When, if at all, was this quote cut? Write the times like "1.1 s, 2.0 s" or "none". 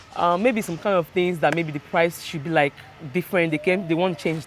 none